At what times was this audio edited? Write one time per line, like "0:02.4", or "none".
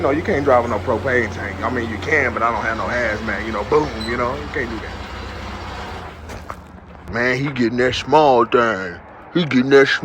0:07.1